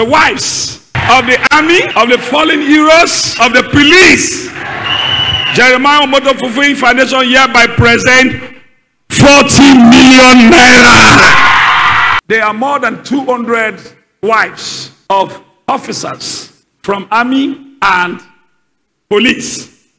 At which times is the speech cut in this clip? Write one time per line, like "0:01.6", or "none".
0:01.9
0:03.3